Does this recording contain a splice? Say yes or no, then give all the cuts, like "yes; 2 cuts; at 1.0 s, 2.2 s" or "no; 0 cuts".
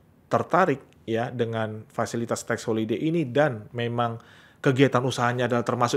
no; 0 cuts